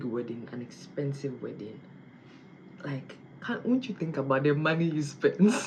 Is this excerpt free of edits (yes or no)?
yes